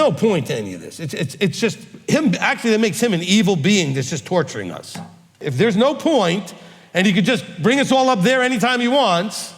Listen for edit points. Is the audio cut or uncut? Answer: cut